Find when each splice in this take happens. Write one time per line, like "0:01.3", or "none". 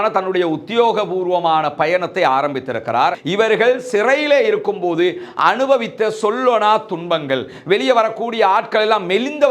0:03.2